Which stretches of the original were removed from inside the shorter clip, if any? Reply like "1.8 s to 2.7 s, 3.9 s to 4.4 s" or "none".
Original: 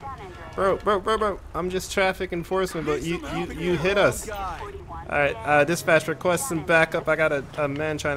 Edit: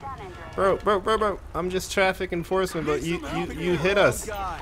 none